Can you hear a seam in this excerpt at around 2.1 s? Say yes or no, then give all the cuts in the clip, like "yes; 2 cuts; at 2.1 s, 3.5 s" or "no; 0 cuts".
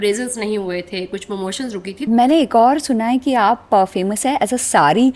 yes; 1 cut; at 2.1 s